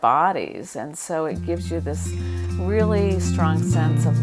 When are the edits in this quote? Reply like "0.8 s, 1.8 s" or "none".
none